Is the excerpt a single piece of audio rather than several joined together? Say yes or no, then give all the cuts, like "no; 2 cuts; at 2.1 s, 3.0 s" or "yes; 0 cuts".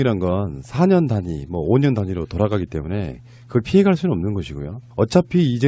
yes; 0 cuts